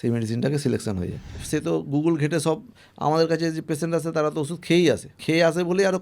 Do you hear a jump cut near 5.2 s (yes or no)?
yes